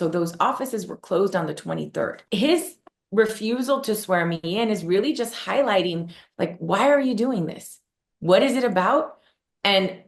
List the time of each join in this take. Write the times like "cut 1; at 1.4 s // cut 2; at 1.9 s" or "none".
cut 1; at 2.2 s